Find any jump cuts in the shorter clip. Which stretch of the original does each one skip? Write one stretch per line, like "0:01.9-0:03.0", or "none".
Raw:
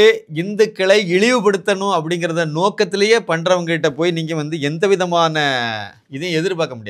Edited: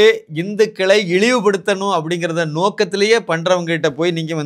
none